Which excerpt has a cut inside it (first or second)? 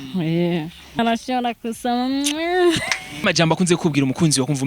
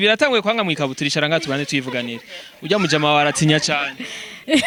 first